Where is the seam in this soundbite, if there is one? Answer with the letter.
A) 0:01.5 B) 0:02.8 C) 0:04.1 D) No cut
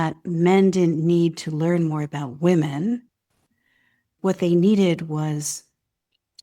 C